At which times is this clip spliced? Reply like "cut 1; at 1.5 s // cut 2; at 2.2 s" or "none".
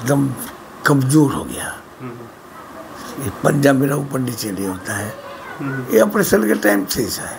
none